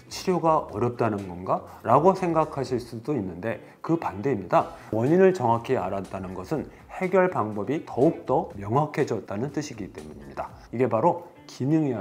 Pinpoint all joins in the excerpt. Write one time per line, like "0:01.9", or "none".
0:10.6